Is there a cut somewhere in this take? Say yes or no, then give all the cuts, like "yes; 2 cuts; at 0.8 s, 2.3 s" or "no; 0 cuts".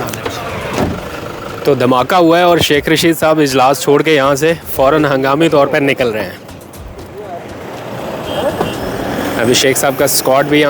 no; 0 cuts